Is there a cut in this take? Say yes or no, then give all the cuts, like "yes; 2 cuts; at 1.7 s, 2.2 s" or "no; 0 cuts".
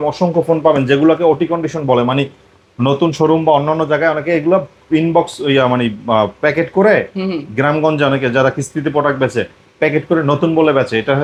no; 0 cuts